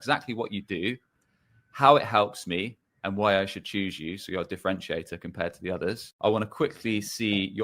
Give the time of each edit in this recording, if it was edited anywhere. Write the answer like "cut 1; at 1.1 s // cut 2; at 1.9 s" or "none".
cut 1; at 6.1 s

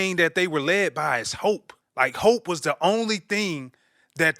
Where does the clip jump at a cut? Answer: cut 1; at 1.8 s

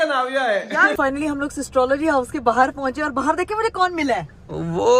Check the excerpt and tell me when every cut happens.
cut 1; at 1.0 s

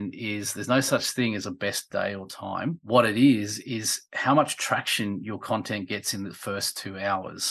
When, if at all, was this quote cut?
none

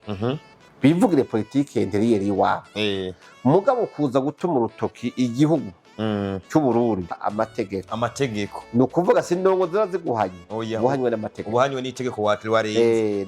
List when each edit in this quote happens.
cut 1; at 7.2 s

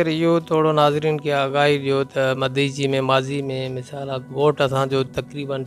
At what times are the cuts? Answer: none

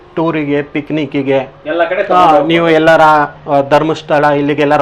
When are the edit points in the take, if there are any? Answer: none

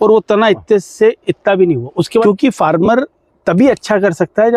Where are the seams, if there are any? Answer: cut 1; at 2.2 s

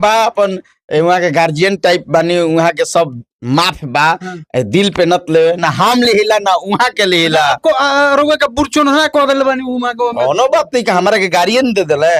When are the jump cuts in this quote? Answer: none

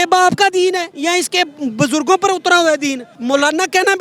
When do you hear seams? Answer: cut 1; at 3.1 s

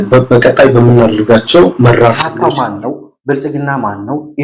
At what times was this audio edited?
cut 1; at 2.4 s

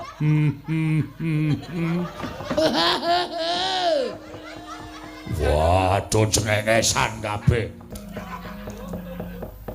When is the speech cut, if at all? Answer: cut 1; at 7.9 s

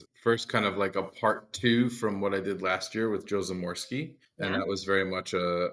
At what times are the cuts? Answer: none

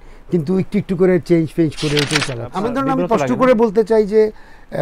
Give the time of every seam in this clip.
cut 1; at 2.4 s

